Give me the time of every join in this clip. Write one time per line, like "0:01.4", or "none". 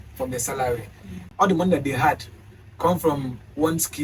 0:01.3